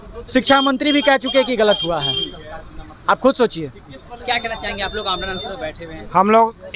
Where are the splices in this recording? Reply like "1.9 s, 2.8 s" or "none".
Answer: none